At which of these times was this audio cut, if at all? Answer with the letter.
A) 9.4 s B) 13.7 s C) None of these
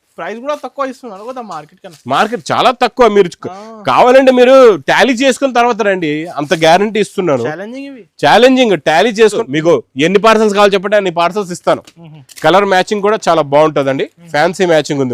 A